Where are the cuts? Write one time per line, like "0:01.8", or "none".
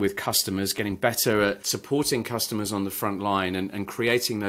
0:01.7